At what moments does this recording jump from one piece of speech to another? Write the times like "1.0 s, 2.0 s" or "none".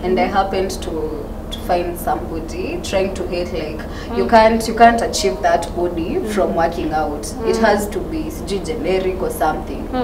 none